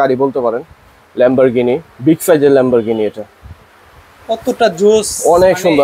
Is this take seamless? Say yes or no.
yes